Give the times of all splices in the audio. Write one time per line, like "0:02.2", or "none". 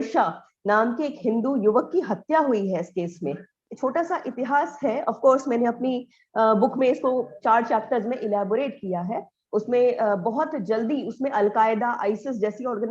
0:03.6